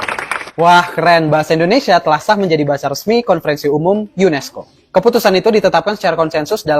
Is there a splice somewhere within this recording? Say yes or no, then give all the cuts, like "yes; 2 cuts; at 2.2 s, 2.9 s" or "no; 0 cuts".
no; 0 cuts